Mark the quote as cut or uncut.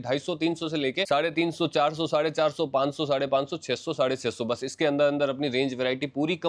uncut